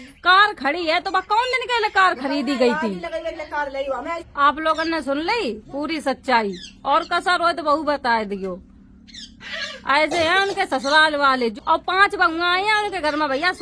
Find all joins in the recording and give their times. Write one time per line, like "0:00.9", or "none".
none